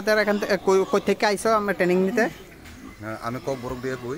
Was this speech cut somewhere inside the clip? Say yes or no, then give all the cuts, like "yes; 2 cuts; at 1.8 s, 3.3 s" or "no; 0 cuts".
no; 0 cuts